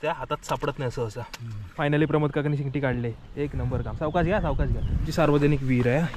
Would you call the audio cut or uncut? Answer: cut